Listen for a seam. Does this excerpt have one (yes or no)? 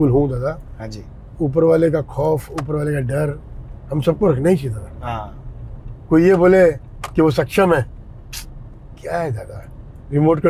no